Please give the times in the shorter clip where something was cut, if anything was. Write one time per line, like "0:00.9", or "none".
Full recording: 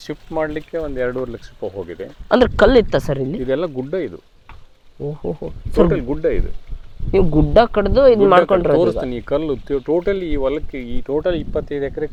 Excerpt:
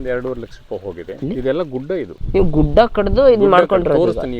0:01.2
0:02.2